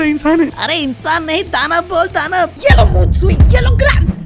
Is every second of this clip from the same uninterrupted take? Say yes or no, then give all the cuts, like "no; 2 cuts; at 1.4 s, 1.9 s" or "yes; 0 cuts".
no; 1 cut; at 2.6 s